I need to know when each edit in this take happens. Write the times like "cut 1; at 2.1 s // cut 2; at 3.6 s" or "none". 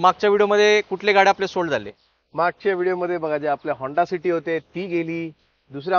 none